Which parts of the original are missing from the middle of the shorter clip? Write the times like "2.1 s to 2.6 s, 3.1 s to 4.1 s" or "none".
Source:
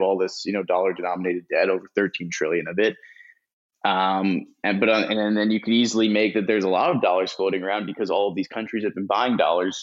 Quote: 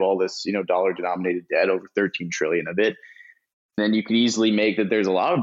3.8 s to 5.4 s

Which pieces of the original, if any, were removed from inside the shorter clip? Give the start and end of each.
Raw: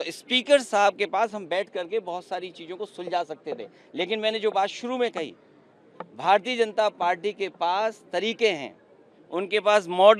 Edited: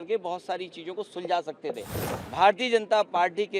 3.8 s to 5.8 s

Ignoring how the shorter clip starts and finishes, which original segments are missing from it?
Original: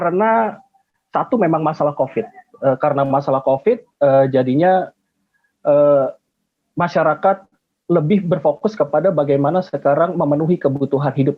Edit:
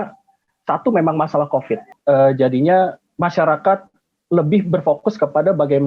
2.4 s to 3.9 s, 5.0 s to 6.6 s

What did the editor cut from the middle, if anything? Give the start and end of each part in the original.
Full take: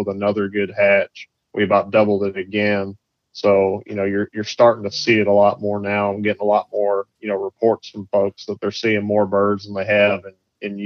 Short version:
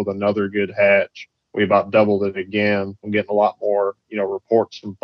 3.1 s to 6.2 s

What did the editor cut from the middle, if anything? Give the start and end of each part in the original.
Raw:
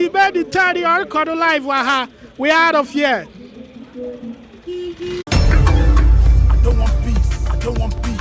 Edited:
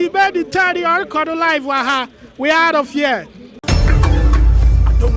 3.6 s to 5.2 s

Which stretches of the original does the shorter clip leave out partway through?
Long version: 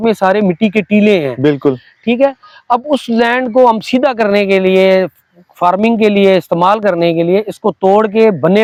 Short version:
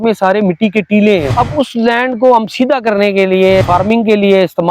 1.3 s to 2.6 s, 4.9 s to 5.5 s

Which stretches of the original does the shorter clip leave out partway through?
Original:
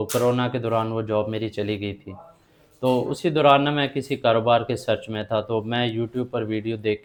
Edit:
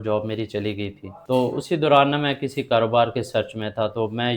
2.1 s to 2.6 s

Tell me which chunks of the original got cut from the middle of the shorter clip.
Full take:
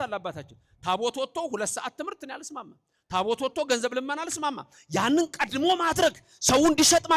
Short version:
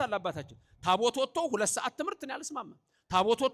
none

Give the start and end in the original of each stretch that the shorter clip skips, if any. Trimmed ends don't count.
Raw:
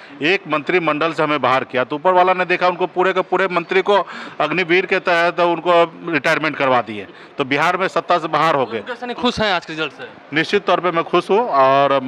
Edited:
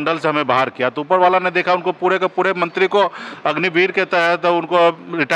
none

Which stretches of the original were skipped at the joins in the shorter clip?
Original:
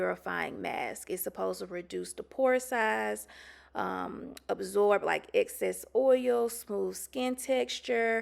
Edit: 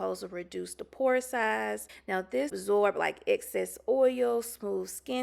3.7 s to 4.3 s

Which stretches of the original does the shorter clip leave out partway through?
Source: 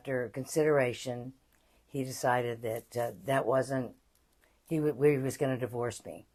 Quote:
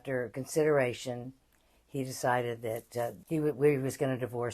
3.2 s to 4.6 s

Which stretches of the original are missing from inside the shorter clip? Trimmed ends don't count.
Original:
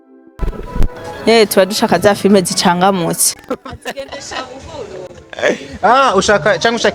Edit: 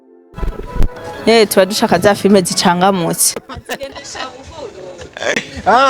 3.4 s to 3.6 s

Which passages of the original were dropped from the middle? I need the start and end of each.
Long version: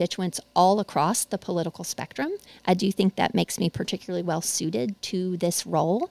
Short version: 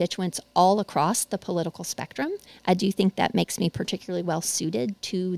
none

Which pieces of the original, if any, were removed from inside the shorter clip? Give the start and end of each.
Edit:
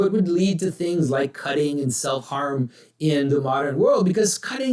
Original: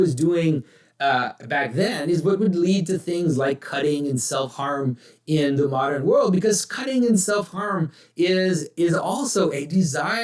none

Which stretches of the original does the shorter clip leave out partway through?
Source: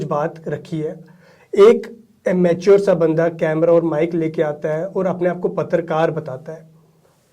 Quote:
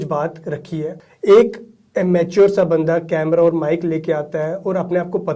1.1 s to 1.4 s

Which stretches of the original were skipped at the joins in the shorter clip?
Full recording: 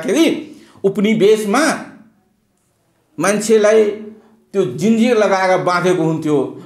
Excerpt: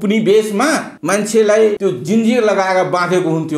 1.9 s to 3.1 s, 3.9 s to 4.5 s

